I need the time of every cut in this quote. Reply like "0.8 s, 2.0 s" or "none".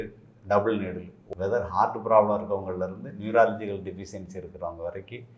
1.2 s